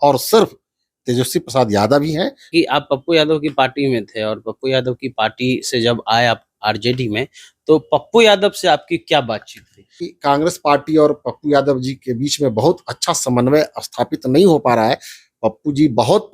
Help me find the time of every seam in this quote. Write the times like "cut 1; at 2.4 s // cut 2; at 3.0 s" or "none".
cut 1; at 2.5 s // cut 2; at 10.1 s